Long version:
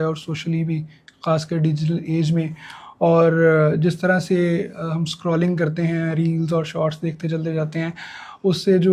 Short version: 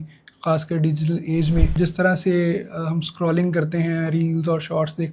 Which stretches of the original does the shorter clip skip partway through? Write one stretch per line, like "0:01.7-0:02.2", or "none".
0:02.5-0:03.8